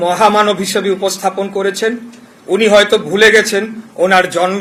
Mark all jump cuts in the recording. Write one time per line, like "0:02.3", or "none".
none